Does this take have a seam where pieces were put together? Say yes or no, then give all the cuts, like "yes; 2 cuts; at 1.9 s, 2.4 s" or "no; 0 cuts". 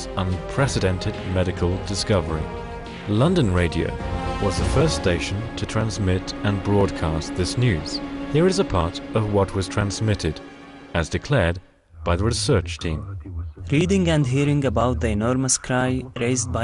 yes; 1 cut; at 11.0 s